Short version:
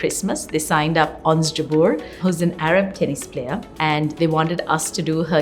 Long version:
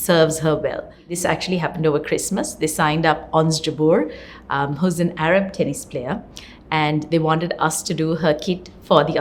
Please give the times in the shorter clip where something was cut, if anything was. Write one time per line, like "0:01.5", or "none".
0:02.1
0:03.7